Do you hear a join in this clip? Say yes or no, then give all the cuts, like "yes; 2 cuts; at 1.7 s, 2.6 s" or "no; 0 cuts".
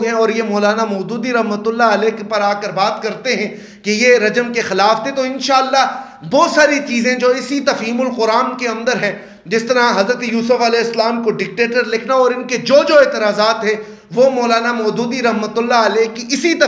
no; 0 cuts